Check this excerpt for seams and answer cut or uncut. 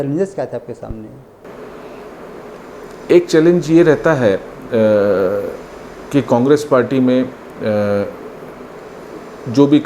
uncut